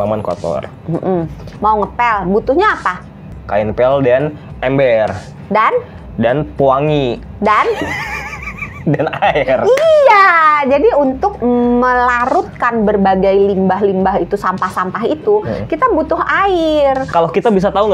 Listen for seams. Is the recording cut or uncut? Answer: cut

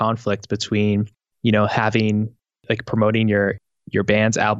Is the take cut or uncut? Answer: uncut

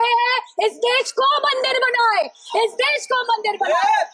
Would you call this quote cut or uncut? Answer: uncut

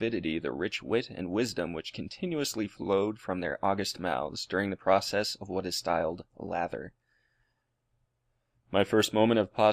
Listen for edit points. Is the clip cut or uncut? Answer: uncut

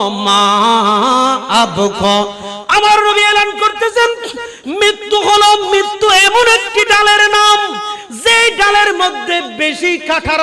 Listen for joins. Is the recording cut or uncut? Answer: uncut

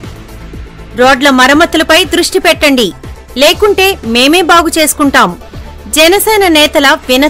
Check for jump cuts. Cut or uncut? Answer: uncut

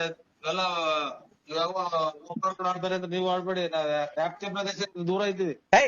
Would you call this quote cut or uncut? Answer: uncut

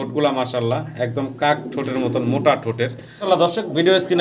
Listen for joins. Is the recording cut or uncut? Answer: cut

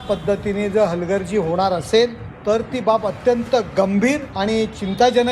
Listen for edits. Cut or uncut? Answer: cut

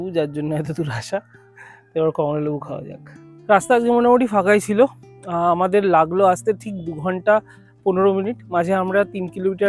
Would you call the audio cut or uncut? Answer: uncut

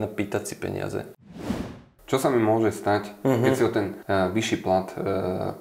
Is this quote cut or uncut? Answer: cut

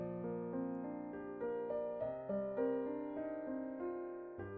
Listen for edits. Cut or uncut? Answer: uncut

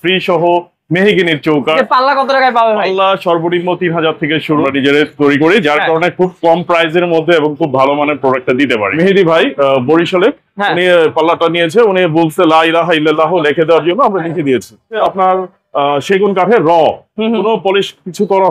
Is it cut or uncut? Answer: cut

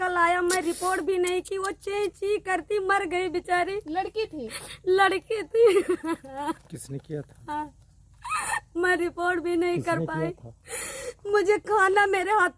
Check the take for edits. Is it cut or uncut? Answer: uncut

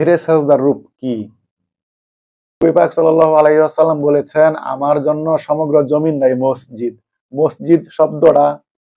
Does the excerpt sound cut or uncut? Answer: cut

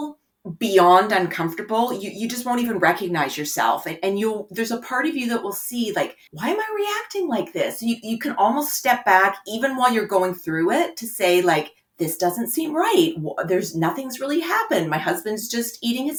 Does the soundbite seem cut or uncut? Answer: uncut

